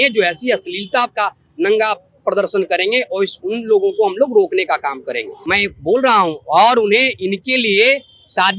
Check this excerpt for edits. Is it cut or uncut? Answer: cut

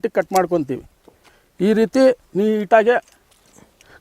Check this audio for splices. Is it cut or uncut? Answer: uncut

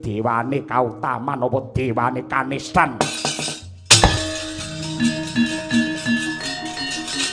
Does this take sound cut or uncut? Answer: cut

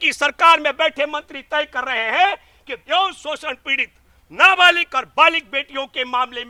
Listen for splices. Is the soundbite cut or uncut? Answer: uncut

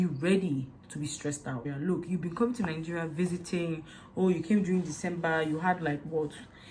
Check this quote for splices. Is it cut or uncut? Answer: cut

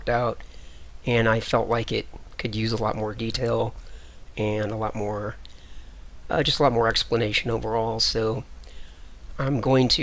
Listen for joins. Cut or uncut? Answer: cut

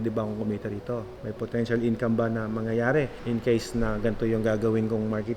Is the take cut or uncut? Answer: cut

